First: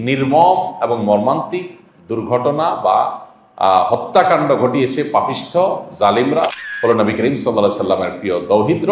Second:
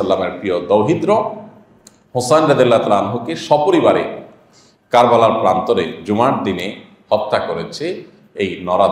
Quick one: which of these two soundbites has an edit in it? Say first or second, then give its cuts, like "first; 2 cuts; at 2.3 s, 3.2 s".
first; 1 cut; at 6.6 s